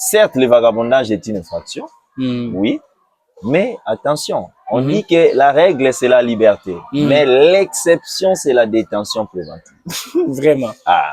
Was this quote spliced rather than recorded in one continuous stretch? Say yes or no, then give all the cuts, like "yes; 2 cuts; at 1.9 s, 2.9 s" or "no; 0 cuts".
no; 0 cuts